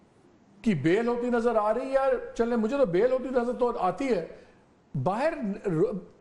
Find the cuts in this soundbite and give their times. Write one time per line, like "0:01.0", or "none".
none